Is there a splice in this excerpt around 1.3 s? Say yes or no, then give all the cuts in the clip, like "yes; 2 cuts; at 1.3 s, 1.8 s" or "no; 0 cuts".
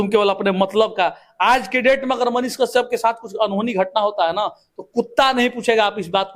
no; 0 cuts